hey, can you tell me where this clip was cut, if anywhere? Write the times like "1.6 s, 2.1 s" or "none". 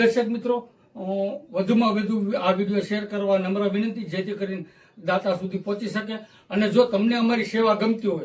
none